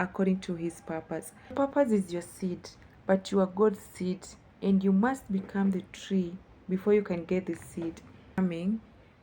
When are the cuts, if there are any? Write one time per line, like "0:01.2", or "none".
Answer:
0:01.5
0:08.4